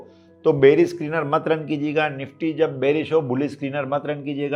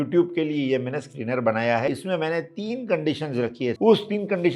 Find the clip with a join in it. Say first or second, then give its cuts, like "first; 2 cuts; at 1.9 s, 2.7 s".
second; 2 cuts; at 1.9 s, 3.8 s